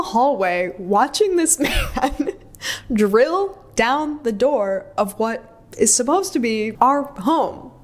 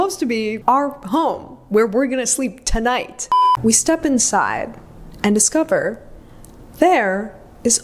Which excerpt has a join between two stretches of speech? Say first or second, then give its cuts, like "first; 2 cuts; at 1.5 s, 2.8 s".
second; 1 cut; at 3.2 s